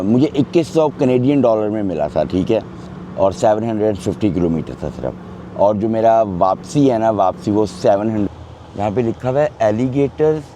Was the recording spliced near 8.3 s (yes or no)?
yes